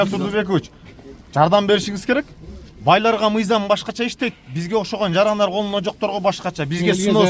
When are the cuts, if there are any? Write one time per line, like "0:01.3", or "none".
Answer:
none